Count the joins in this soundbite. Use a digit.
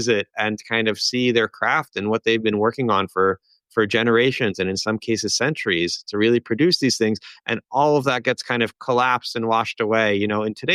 0